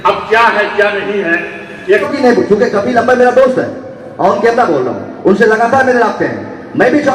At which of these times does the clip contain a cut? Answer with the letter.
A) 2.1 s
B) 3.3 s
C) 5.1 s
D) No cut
A